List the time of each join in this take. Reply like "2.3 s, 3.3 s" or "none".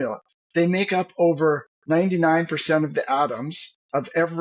none